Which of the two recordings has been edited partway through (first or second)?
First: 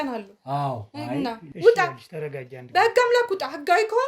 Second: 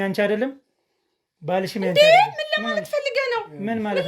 first